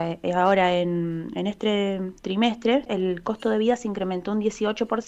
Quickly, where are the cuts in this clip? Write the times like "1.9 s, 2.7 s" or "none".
2.9 s